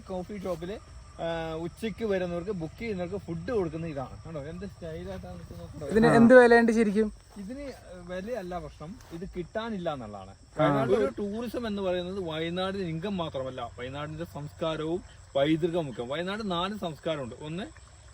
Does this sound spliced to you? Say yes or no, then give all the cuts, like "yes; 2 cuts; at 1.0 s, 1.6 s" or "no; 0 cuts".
yes; 2 cuts; at 5.8 s, 11.0 s